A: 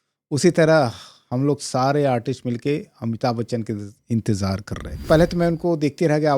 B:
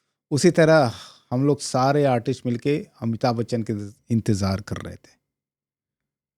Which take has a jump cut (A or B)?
A